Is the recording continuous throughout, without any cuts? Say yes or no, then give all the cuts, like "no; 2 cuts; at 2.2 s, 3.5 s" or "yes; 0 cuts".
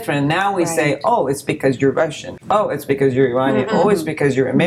yes; 0 cuts